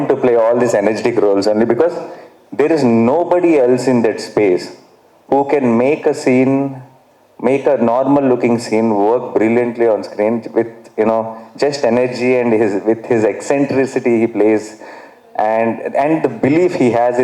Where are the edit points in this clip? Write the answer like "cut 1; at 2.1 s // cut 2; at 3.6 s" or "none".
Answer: none